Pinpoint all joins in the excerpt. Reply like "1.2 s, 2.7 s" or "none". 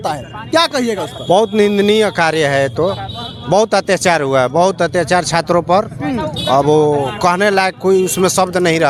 none